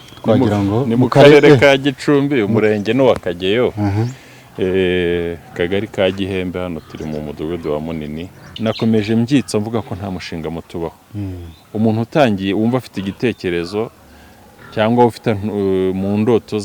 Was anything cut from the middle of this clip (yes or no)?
yes